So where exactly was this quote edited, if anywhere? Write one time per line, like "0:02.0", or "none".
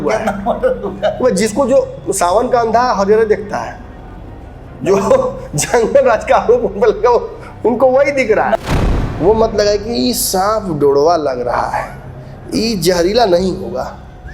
0:08.6